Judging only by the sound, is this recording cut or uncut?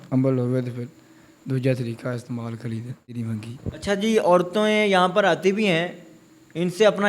cut